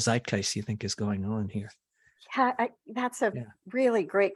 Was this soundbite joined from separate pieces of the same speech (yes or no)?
no